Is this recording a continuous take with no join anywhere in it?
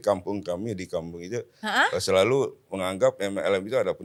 yes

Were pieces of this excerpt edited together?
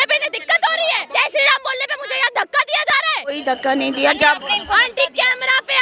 yes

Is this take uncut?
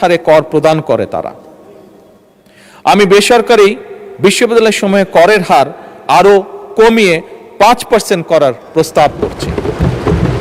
yes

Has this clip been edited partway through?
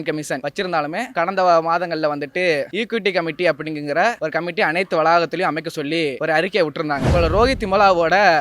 yes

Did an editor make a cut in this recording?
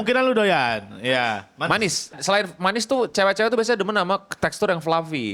yes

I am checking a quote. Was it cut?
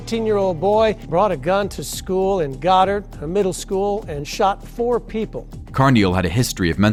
no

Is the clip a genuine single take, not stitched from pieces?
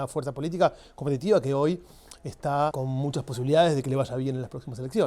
no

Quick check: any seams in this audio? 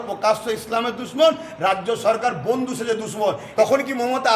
yes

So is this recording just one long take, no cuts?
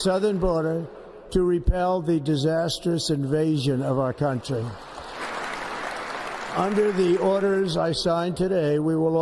no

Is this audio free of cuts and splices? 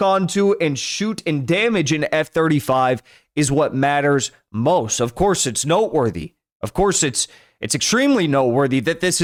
yes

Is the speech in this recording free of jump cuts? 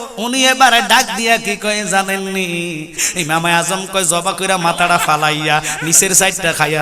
no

